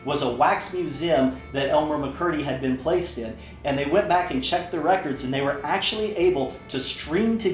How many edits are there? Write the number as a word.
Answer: zero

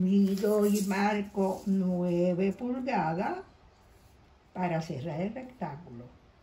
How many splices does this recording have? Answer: zero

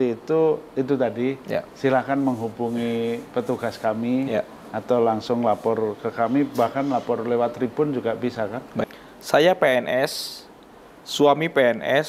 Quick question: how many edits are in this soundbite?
one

